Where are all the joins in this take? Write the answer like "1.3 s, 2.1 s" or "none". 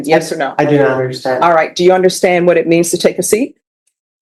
none